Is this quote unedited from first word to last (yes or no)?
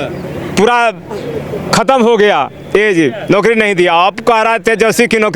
yes